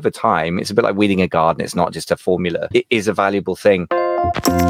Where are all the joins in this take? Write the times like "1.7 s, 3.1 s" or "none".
2.7 s, 3.9 s